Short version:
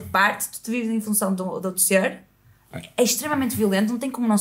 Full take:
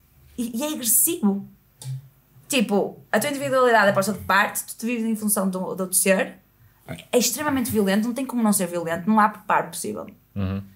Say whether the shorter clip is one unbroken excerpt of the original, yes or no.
yes